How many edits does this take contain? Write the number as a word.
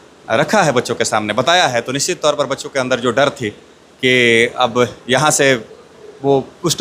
zero